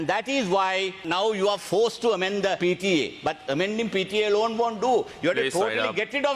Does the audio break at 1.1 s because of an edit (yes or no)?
yes